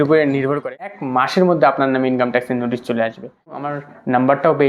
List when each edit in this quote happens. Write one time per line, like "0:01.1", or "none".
0:01.0
0:03.8